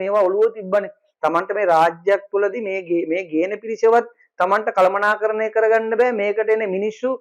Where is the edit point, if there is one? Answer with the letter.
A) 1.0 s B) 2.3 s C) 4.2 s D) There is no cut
A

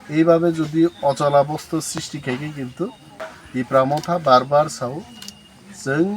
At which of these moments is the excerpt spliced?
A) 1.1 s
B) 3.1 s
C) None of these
B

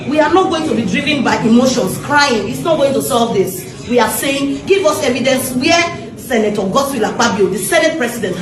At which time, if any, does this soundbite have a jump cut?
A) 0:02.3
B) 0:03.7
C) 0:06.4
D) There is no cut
B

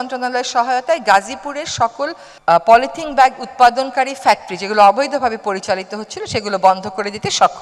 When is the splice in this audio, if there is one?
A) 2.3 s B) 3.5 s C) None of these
A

